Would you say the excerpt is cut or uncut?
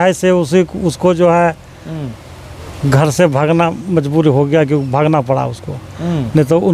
uncut